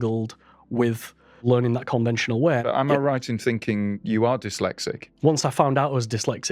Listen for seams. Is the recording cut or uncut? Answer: cut